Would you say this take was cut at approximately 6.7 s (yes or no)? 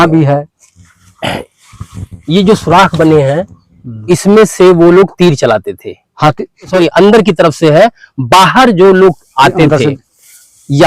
yes